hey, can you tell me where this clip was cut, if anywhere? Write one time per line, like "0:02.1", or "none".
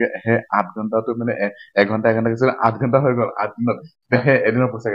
none